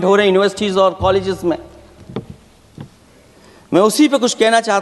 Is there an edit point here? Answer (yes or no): no